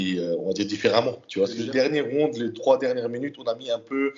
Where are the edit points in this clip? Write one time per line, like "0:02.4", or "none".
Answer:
0:01.6